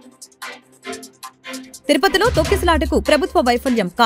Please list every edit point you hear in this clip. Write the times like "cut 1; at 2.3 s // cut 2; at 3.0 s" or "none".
none